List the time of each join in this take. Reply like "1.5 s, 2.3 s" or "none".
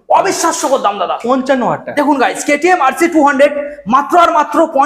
none